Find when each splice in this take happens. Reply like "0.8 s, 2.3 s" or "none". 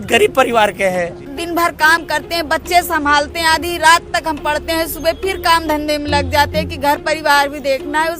1.3 s